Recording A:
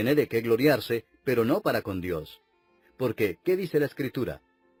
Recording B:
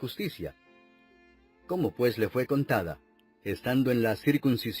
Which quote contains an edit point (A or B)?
B